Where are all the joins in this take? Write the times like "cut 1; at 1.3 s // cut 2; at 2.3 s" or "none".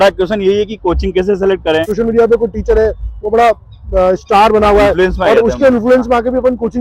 cut 1; at 1.9 s